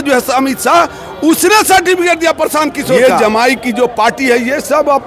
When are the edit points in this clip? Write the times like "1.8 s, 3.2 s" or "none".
3.0 s